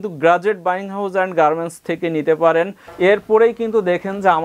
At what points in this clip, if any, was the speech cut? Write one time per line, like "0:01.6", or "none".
0:02.8